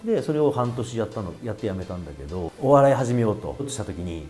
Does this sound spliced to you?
yes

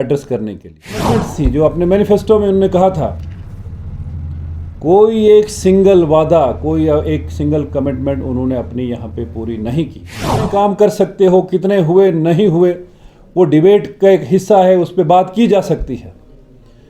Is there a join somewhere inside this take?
yes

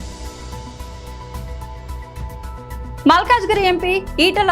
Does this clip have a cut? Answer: no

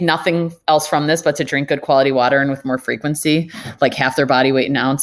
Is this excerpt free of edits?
yes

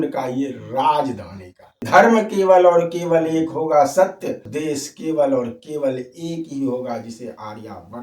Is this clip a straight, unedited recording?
no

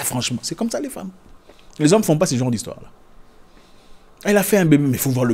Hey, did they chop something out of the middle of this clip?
no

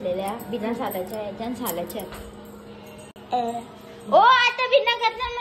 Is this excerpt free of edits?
yes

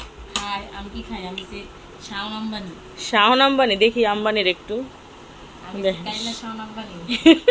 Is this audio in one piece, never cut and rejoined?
yes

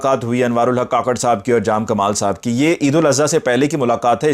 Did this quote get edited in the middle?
no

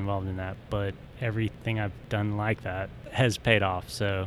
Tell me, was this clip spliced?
yes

